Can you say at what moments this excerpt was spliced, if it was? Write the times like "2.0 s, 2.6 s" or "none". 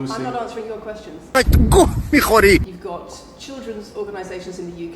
2.7 s